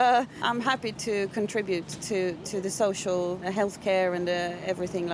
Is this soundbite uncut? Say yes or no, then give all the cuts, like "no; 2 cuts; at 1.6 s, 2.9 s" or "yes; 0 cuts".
no; 1 cut; at 0.9 s